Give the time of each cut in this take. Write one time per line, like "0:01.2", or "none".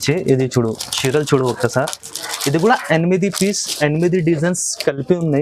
none

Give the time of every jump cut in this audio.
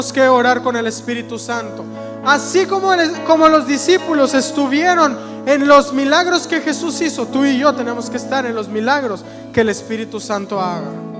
none

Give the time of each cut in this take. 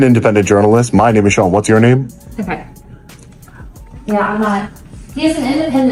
none

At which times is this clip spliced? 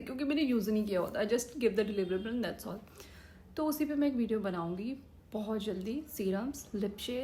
none

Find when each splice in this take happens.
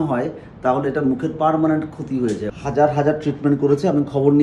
0:02.5

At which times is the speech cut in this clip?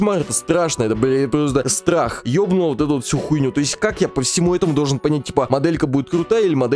0:02.2

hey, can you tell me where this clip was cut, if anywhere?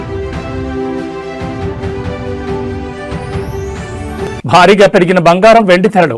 0:04.3

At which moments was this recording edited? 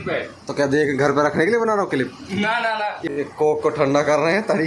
0:03.0

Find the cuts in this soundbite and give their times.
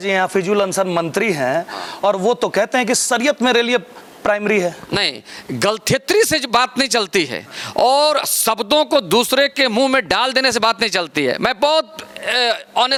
none

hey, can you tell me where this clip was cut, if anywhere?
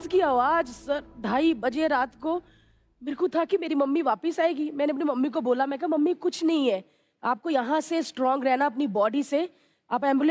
none

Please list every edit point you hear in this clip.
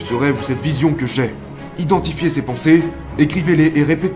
0:01.6

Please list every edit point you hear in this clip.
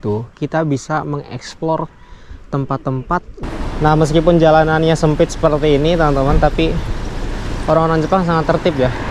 0:03.4

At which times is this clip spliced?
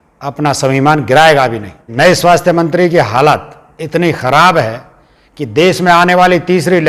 0:01.9

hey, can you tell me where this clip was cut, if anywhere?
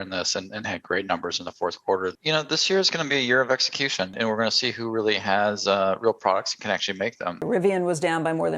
0:02.1
0:04.1
0:07.4

